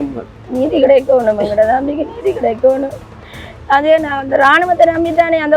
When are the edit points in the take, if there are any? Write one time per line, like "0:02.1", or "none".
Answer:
none